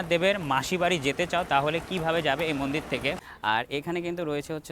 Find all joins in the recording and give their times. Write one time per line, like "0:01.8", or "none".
0:03.3